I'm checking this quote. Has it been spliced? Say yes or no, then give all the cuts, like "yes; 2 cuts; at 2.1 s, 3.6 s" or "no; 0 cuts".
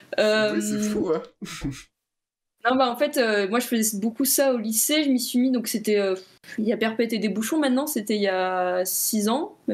no; 0 cuts